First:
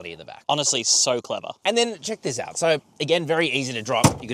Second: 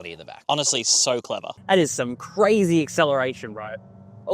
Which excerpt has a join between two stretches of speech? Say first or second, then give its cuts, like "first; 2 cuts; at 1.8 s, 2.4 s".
second; 1 cut; at 1.5 s